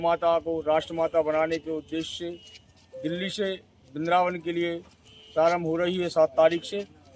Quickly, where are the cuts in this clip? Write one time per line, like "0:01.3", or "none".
none